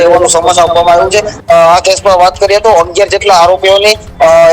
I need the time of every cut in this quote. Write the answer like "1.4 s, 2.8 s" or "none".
1.3 s